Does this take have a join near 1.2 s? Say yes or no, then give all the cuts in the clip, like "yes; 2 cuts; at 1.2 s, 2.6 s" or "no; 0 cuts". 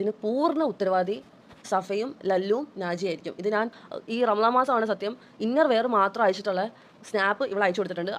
no; 1 cut; at 3.7 s